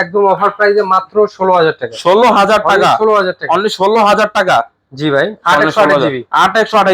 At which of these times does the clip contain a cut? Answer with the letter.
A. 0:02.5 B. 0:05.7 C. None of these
C